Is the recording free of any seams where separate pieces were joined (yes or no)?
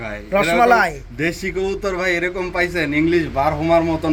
yes